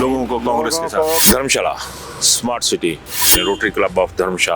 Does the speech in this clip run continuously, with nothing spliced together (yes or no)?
no